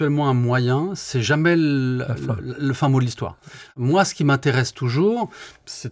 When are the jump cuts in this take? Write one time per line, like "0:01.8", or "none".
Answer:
0:03.7